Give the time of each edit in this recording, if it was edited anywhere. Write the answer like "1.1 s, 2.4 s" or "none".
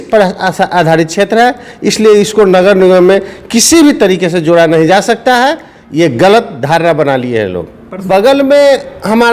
8.0 s